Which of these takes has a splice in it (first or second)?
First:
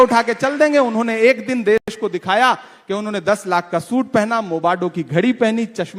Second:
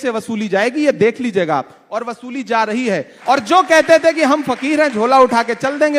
second